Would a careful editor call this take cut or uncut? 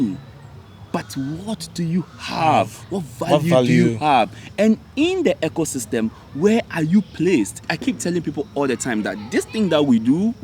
cut